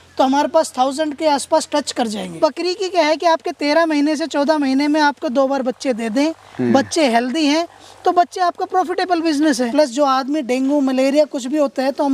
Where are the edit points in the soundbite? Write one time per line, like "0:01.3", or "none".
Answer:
0:02.4
0:09.6